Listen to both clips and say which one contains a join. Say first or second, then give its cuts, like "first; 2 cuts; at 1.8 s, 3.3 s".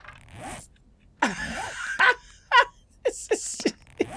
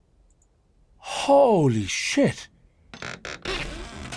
second; 1 cut; at 3.0 s